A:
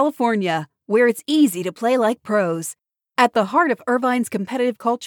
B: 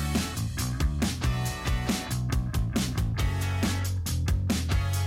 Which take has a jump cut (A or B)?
B